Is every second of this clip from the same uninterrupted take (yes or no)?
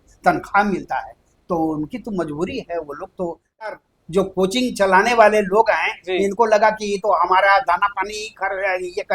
no